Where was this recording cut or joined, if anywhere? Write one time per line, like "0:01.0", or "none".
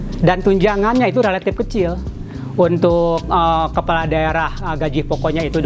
none